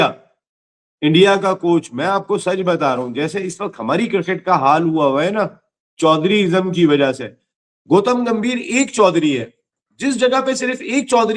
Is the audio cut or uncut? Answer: uncut